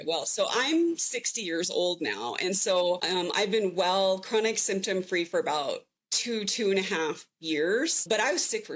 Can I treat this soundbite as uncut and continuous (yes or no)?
no